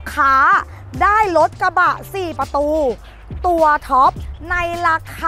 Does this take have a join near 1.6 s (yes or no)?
no